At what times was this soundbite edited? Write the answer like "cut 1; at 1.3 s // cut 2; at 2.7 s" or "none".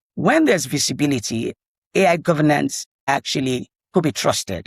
cut 1; at 3.0 s

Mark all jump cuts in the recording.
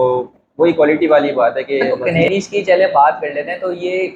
cut 1; at 2.0 s

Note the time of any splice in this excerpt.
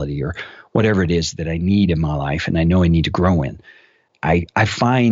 none

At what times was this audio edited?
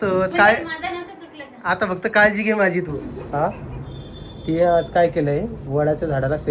cut 1; at 3.2 s

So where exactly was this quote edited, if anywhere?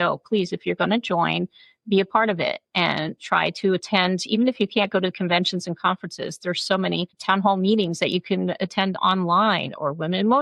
none

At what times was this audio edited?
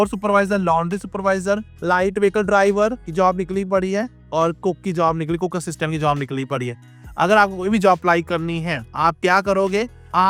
none

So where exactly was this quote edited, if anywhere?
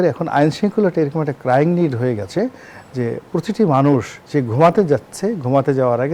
none

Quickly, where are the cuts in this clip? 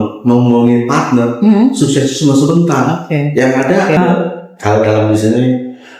cut 1; at 4.0 s

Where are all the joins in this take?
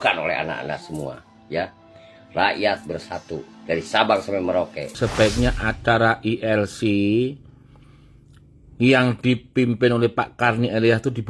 cut 1; at 4.9 s

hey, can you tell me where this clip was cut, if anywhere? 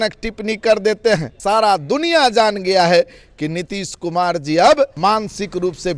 cut 1; at 1.3 s // cut 2; at 5.0 s

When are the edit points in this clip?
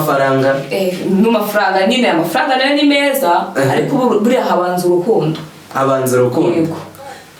none

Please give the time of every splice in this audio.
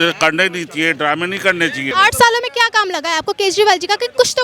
cut 1; at 1.9 s

